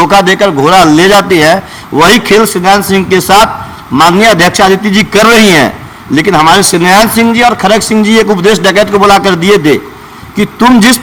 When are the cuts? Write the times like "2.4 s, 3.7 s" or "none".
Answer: none